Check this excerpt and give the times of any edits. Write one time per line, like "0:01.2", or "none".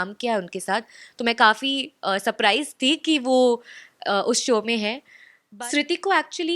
0:05.4

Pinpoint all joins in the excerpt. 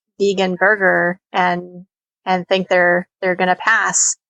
none

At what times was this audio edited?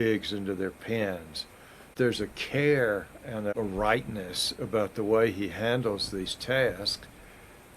0:01.9
0:03.5

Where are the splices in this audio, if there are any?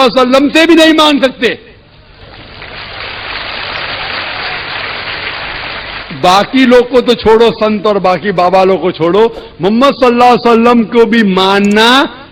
none

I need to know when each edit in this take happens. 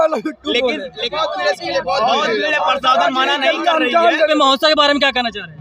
0:01.0
0:04.3

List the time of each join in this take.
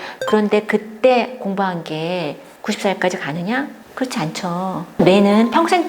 0:02.5
0:03.8
0:05.0

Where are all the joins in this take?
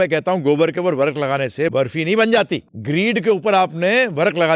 0:01.7
0:02.7

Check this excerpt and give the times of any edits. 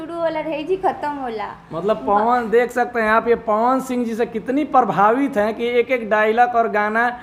none

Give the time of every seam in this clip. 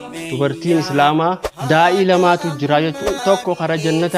0:01.5
0:03.1

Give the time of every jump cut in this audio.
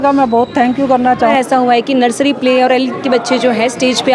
0:01.3

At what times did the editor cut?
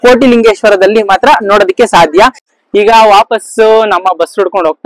none

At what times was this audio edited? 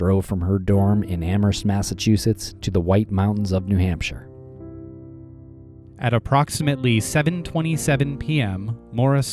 none

